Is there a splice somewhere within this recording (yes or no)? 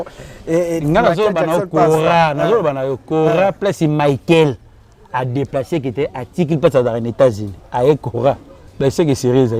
no